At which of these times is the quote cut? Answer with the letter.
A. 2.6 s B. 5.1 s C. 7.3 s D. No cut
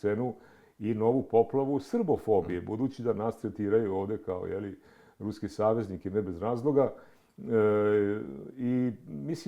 D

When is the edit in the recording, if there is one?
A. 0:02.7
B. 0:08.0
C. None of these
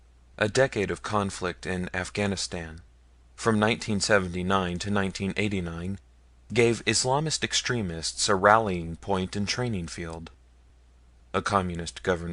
B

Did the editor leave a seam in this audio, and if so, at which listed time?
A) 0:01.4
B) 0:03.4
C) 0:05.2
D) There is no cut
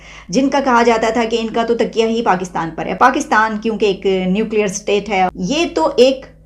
C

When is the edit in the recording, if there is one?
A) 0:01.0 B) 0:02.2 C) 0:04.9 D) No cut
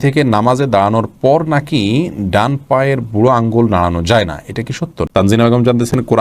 C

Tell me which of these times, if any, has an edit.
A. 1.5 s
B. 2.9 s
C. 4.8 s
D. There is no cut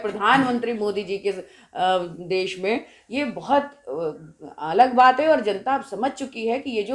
D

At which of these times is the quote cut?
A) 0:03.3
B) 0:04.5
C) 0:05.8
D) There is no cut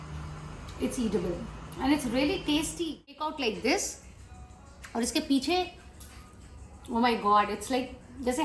A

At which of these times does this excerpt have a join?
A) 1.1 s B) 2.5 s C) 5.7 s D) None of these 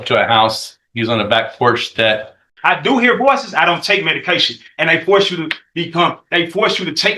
B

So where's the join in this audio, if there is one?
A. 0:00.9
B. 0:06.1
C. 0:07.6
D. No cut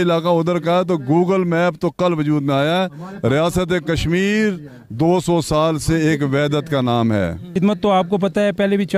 C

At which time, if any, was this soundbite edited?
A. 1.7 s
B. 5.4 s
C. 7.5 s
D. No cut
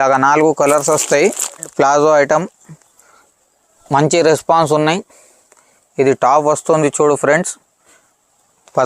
A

